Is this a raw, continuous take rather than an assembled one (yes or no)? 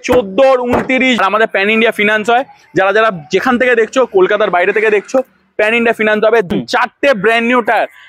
no